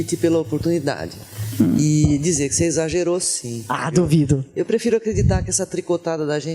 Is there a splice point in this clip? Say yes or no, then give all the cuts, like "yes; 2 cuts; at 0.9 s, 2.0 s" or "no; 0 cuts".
yes; 1 cut; at 2.5 s